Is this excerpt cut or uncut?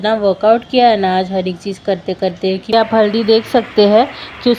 cut